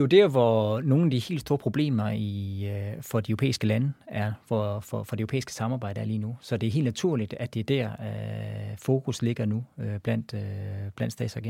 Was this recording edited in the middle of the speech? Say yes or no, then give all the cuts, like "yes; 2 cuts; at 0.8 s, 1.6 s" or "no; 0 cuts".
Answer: no; 0 cuts